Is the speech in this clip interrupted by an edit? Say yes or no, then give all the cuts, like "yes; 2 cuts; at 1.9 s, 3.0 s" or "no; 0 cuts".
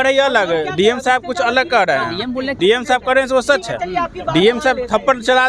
yes; 1 cut; at 2.6 s